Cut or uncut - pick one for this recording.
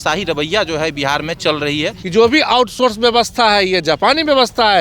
cut